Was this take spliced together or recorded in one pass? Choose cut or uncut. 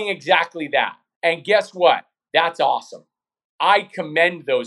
cut